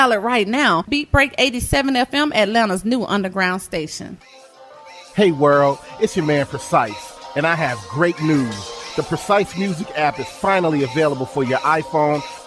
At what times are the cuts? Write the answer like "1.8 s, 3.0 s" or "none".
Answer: 4.2 s